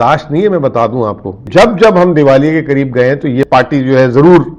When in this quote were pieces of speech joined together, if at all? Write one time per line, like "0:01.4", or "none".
0:01.5
0:03.5